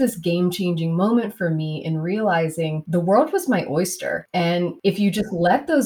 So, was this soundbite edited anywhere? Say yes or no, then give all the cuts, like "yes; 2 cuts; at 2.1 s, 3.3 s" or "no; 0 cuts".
yes; 2 cuts; at 2.8 s, 4.6 s